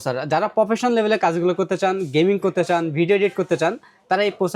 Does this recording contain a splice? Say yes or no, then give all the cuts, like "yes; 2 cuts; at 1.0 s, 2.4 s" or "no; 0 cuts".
no; 0 cuts